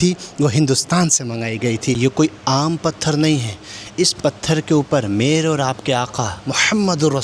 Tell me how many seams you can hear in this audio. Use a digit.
1